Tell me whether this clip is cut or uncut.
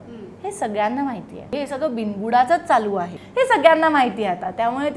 cut